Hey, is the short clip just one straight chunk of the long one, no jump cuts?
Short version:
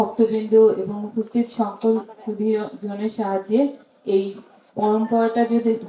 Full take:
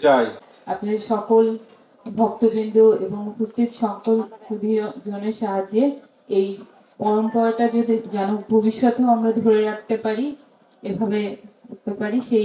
yes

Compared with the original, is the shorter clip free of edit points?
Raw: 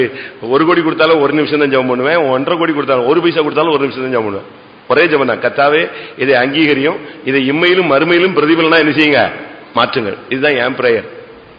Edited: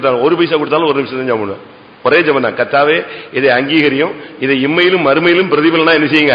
yes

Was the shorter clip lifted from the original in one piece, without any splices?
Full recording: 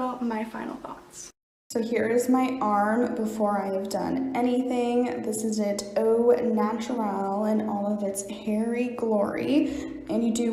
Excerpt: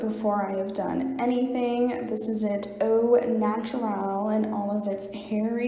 yes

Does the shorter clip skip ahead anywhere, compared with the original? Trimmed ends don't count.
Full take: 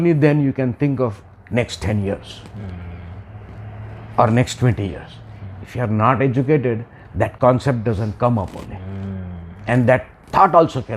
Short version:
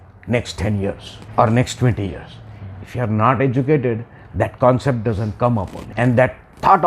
yes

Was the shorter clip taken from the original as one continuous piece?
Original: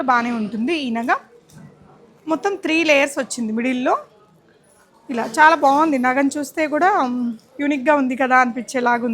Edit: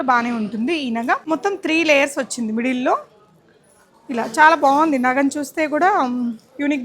no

